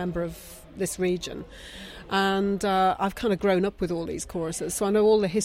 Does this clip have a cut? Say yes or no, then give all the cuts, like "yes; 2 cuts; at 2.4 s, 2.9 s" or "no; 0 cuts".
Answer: no; 0 cuts